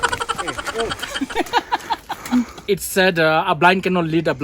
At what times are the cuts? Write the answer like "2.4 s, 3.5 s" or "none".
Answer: 2.6 s

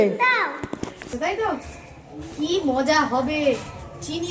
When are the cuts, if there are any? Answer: 1.0 s

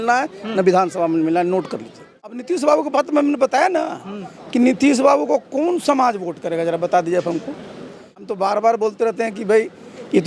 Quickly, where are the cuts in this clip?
2.3 s, 8.3 s

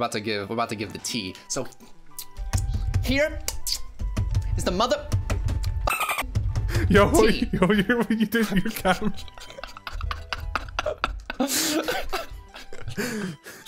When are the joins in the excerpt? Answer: none

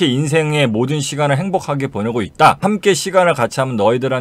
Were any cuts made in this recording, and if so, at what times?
2.6 s

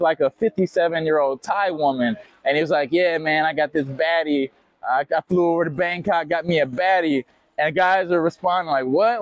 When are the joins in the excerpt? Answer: none

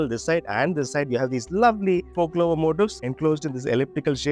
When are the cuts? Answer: none

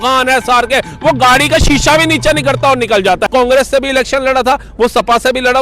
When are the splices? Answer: 3.3 s

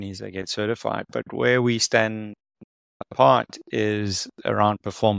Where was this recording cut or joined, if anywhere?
none

